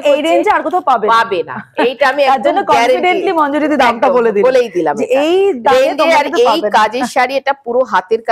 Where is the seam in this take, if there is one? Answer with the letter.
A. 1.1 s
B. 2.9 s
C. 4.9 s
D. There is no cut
D